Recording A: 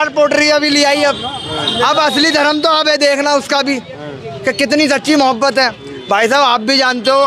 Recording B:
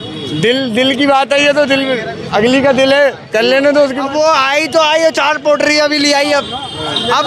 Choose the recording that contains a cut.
B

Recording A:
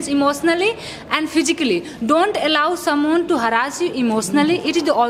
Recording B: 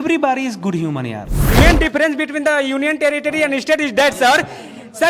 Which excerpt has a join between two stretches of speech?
B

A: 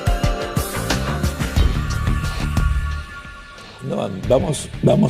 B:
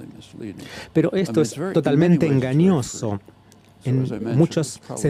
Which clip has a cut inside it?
A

